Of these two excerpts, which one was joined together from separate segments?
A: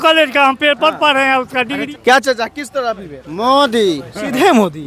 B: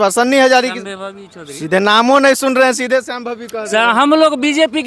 A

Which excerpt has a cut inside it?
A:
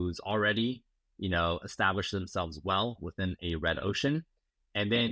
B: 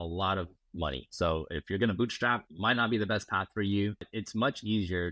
B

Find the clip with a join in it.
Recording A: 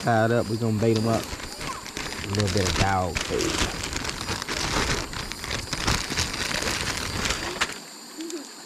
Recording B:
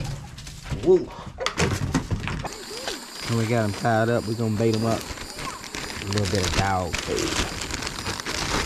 B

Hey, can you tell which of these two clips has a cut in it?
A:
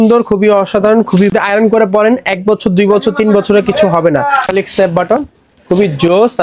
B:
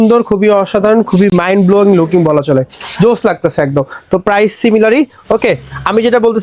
A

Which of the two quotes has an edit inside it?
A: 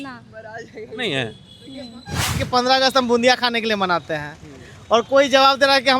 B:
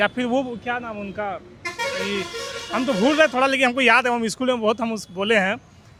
A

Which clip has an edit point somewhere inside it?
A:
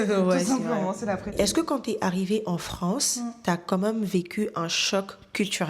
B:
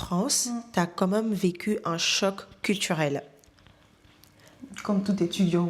A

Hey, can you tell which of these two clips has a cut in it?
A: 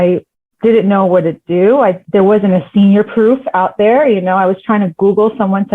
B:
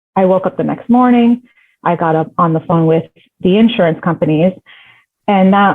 A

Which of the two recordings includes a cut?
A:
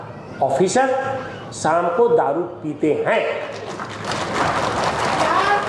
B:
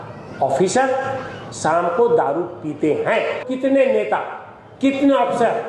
B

